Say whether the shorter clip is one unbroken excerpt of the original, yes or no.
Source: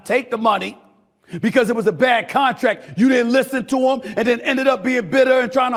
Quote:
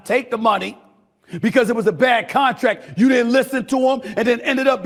yes